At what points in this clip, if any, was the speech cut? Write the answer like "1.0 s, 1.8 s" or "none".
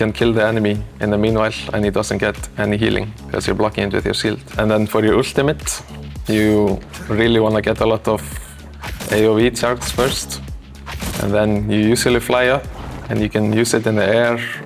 none